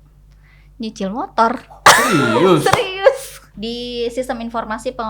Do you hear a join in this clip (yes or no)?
yes